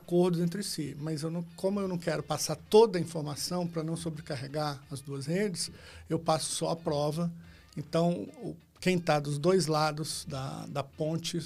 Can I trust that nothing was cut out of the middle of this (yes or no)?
yes